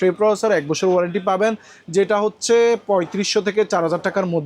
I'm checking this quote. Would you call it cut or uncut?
uncut